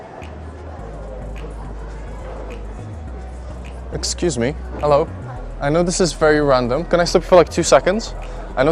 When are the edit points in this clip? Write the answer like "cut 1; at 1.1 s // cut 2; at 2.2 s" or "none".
none

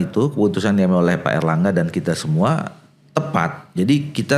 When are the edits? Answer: none

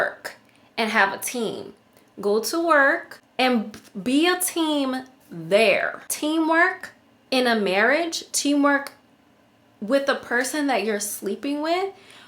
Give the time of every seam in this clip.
cut 1; at 3.2 s // cut 2; at 6.0 s

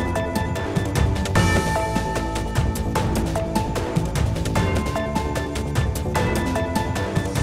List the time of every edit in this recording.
none

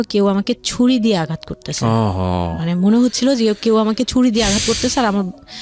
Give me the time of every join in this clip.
none

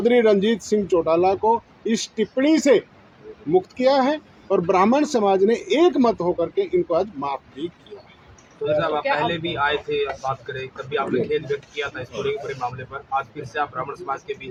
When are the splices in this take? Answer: none

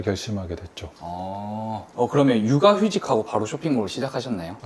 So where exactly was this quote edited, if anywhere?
cut 1; at 1.8 s

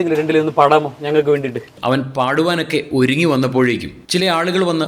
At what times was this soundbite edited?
cut 1; at 1.7 s

